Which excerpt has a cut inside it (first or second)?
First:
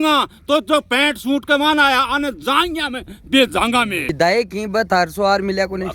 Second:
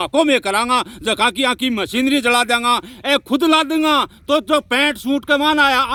first